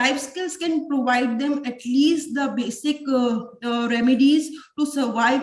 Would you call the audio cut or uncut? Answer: uncut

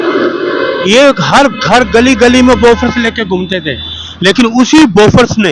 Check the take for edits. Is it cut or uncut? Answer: uncut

